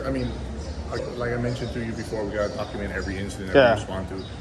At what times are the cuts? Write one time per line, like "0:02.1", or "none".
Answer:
0:01.0